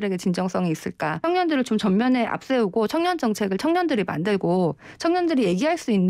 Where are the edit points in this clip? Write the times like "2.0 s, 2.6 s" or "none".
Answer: 1.2 s